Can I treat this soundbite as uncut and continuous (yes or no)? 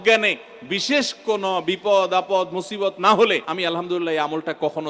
no